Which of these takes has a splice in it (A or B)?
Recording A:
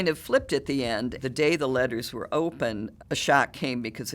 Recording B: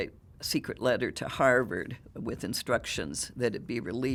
A